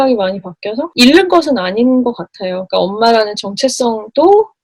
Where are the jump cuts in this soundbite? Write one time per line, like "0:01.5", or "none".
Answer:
0:00.9